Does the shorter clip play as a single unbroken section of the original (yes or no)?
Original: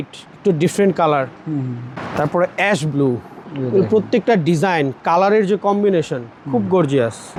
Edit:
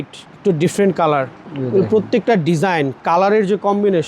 no